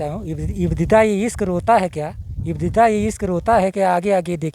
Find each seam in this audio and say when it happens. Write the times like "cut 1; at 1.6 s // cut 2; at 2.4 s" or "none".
none

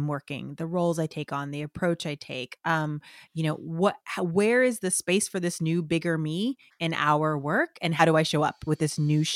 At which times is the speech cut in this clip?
cut 1; at 7.9 s

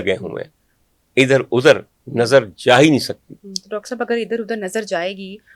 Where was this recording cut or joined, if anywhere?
none

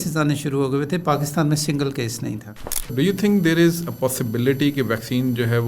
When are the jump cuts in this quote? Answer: cut 1; at 2.9 s

